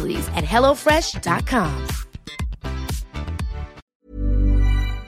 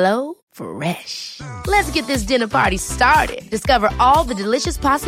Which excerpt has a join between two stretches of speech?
first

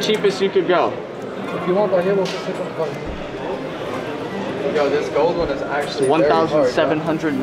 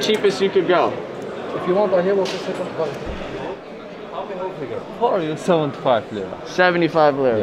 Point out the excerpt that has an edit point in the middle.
second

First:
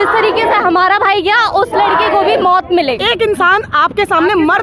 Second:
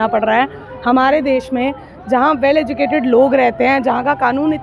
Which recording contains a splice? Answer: first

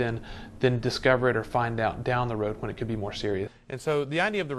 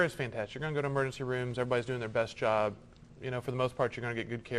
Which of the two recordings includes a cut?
first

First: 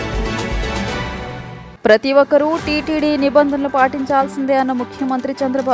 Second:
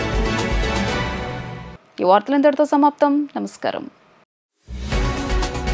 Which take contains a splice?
first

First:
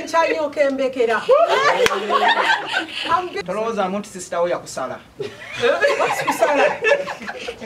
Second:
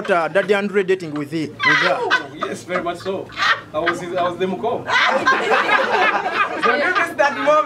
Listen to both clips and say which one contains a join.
first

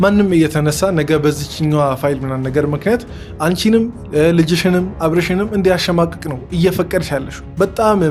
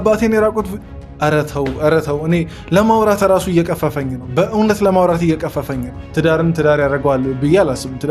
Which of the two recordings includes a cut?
second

